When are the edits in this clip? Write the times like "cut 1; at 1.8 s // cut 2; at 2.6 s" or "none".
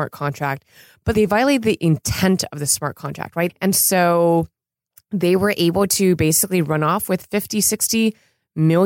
cut 1; at 1.1 s // cut 2; at 3.6 s